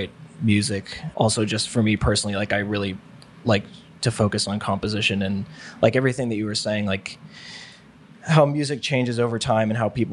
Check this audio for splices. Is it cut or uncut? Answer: cut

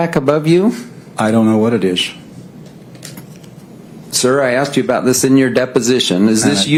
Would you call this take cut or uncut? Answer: uncut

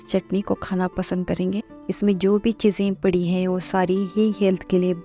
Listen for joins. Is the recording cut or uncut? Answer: cut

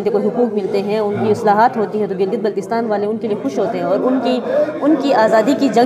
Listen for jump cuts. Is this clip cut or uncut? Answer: uncut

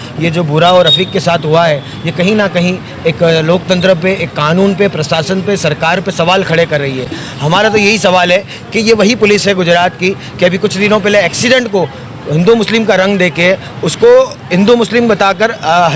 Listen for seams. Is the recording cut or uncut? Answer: uncut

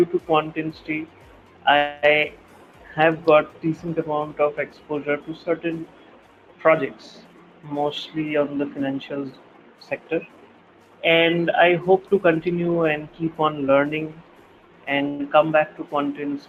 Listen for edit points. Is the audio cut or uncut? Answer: uncut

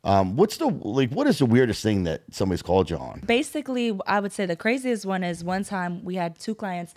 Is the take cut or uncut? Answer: cut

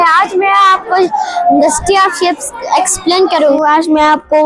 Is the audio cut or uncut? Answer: cut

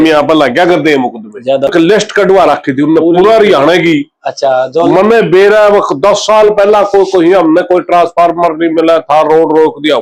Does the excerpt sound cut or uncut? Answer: cut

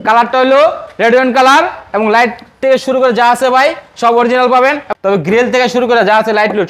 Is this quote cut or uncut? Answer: cut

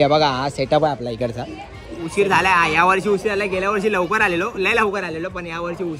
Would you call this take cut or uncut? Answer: cut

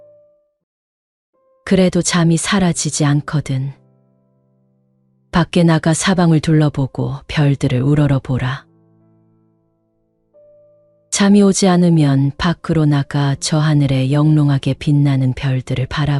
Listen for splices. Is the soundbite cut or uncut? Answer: cut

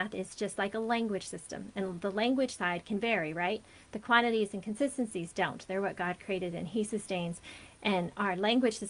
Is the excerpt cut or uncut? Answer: uncut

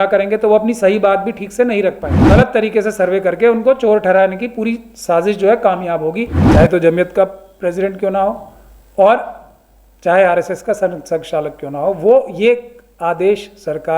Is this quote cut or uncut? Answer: cut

